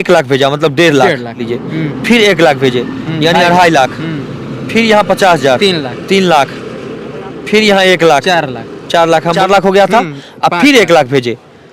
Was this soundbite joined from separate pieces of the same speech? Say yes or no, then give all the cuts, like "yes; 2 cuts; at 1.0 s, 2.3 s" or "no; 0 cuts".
yes; 2 cuts; at 1.5 s, 9.4 s